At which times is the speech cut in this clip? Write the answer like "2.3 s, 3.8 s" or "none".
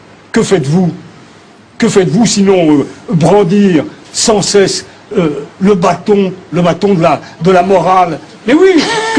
none